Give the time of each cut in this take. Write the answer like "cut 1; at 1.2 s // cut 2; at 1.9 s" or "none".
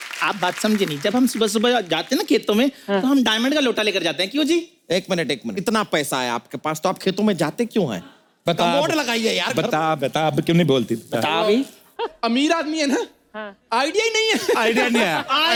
none